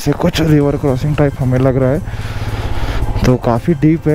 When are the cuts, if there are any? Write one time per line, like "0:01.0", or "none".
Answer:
none